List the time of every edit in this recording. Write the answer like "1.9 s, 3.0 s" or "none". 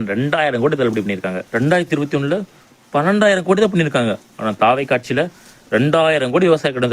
1.4 s